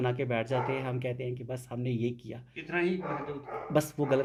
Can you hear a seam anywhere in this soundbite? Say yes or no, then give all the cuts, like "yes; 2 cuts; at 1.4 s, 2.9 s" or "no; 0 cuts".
no; 0 cuts